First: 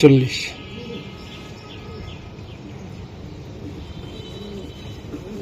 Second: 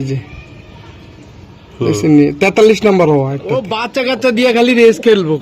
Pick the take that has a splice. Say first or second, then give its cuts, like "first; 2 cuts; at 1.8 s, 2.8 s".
second; 1 cut; at 4.0 s